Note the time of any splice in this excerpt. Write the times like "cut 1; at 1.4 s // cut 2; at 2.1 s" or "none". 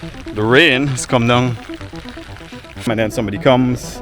cut 1; at 2.9 s

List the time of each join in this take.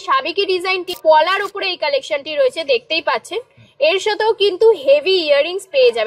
cut 1; at 0.9 s

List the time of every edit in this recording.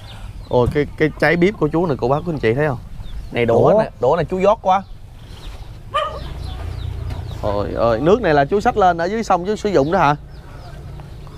cut 1; at 6.1 s

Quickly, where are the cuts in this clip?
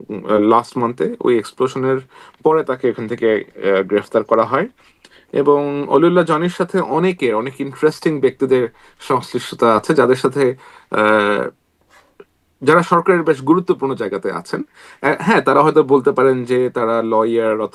none

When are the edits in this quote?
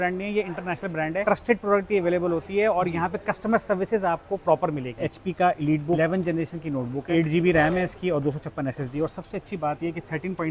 cut 1; at 1.2 s // cut 2; at 5.0 s // cut 3; at 6.0 s // cut 4; at 7.0 s

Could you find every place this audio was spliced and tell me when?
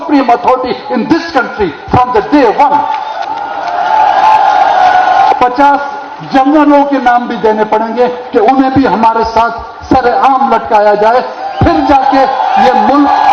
cut 1; at 3.2 s // cut 2; at 5.3 s

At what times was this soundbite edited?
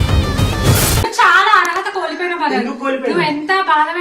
cut 1; at 1.0 s

